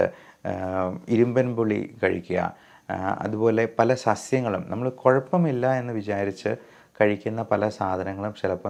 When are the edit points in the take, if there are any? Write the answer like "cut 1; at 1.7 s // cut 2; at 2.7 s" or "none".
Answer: none